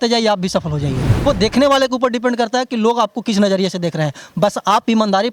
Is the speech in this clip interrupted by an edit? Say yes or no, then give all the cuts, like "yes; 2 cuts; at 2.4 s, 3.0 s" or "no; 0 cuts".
yes; 1 cut; at 1.2 s